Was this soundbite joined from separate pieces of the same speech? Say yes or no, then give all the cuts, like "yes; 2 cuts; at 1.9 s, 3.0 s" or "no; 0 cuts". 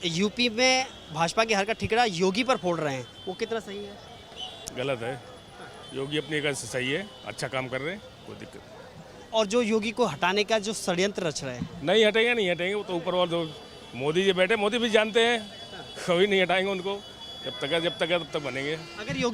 no; 0 cuts